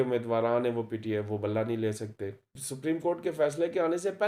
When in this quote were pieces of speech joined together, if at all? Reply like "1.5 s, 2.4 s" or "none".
2.4 s